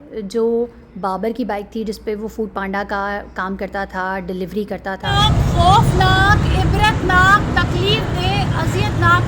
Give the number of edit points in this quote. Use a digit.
1